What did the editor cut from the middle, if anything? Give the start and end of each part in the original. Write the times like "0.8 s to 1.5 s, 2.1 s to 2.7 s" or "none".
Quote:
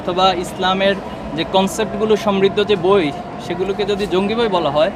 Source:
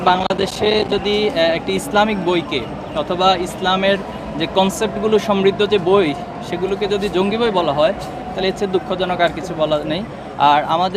none